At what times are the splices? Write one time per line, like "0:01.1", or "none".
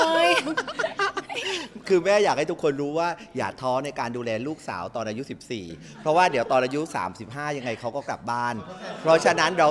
none